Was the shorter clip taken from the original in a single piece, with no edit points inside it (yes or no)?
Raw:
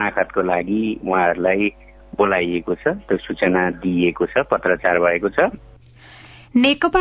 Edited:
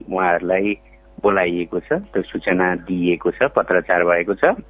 yes